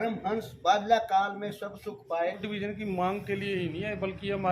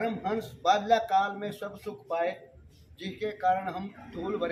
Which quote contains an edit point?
first; 1 cut; at 2.4 s

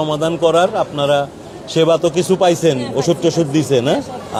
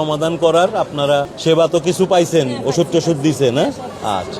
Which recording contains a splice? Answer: second; 1 cut; at 1.3 s

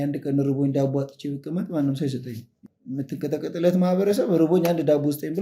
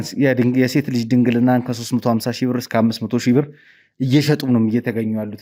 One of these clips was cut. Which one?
first; 1 cut; at 2.6 s

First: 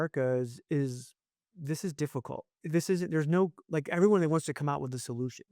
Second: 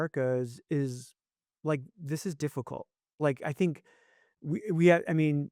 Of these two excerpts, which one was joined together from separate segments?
first; 2 cuts; at 1.5 s, 2.5 s

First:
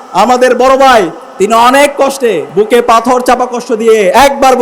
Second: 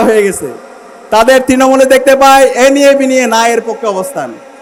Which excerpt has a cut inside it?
first; 2 cuts; at 1.2 s, 2.5 s

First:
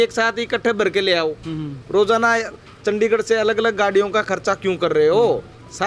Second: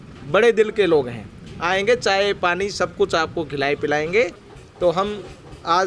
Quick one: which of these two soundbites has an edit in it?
second; 1 cut; at 4.5 s

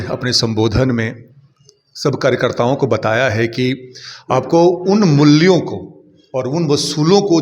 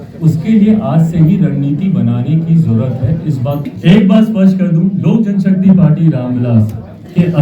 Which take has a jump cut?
second; 1 cut; at 3.7 s

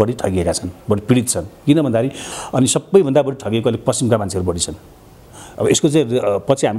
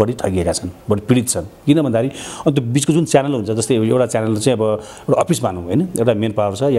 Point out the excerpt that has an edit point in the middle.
first; 1 cut; at 2.3 s

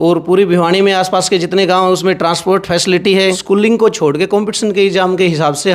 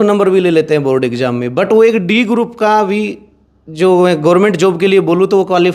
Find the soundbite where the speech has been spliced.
first; 1 cut; at 3.4 s

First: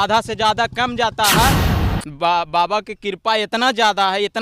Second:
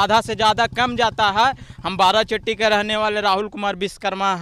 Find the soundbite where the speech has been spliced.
first; 1 cut; at 1.7 s

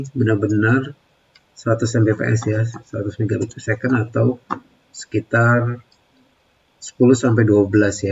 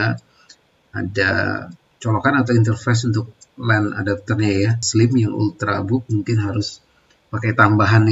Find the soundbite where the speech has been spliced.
second; 1 cut; at 4.8 s

